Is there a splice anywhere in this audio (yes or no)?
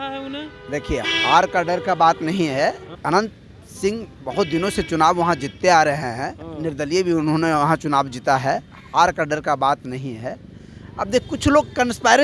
yes